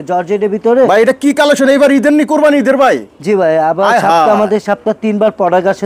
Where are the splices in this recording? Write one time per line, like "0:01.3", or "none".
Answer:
none